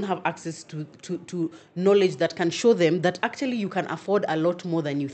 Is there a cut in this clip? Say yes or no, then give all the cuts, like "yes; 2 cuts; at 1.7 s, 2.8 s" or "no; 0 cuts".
no; 0 cuts